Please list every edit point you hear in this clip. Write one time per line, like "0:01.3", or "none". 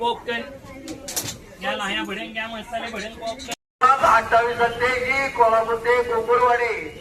none